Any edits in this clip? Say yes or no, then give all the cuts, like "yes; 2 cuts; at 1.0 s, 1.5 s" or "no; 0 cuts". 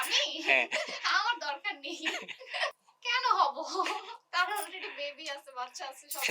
yes; 1 cut; at 2.8 s